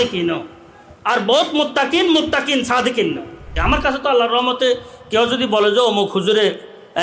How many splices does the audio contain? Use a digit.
1